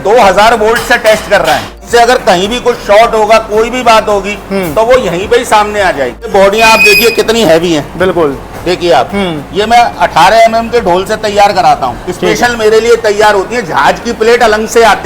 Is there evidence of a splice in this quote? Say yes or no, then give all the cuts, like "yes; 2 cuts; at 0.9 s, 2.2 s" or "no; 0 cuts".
yes; 2 cuts; at 1.7 s, 6.3 s